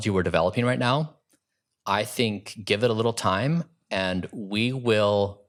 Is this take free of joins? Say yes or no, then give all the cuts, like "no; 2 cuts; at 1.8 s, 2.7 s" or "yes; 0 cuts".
yes; 0 cuts